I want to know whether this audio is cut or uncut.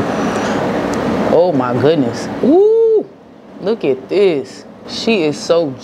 uncut